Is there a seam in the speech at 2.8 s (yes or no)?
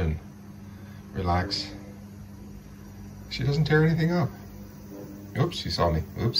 no